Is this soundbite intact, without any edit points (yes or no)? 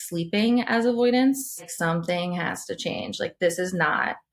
no